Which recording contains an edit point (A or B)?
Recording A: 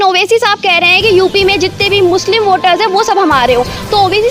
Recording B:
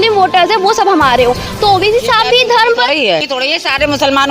B